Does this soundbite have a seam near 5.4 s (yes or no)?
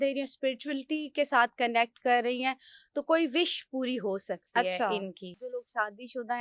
yes